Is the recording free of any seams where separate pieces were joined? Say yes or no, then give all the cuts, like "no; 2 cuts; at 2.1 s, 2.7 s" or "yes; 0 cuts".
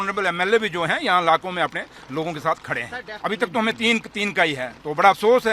yes; 0 cuts